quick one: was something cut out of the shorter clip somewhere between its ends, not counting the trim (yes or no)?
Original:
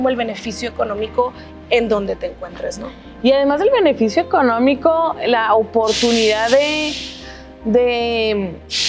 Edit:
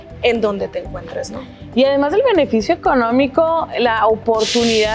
no